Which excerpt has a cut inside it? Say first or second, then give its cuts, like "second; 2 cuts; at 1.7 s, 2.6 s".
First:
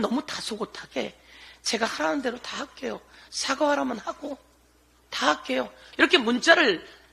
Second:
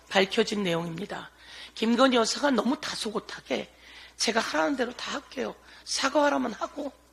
first; 1 cut; at 5.8 s